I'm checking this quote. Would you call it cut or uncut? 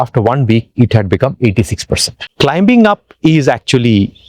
cut